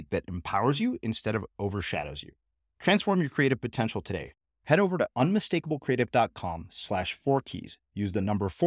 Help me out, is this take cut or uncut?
uncut